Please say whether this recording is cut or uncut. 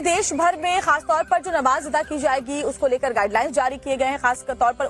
cut